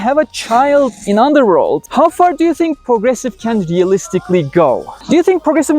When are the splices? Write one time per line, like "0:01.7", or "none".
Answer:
0:01.8
0:04.9